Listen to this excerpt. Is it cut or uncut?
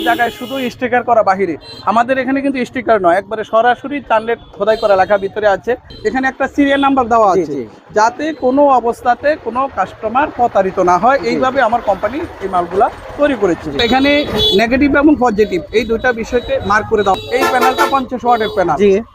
cut